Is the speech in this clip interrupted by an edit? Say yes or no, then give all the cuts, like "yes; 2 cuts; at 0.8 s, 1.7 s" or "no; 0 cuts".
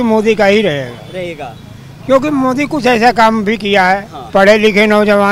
yes; 1 cut; at 4.1 s